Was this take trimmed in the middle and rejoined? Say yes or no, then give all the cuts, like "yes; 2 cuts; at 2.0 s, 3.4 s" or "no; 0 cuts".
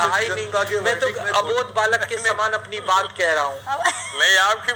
no; 0 cuts